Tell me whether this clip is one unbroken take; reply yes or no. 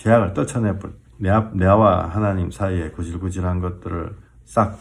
yes